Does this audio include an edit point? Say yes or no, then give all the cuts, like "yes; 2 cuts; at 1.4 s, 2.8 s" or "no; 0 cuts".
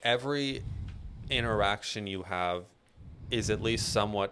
no; 0 cuts